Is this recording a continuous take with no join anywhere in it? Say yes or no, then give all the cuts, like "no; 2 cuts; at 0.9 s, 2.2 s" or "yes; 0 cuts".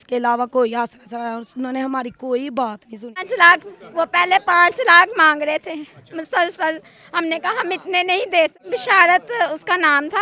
no; 2 cuts; at 3.3 s, 8.6 s